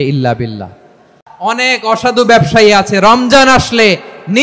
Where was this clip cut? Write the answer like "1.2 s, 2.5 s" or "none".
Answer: 1.2 s